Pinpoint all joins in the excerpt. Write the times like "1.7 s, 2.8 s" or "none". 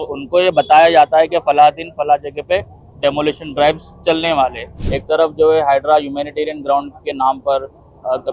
4.7 s